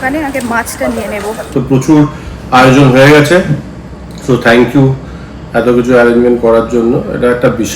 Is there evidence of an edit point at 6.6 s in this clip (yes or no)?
no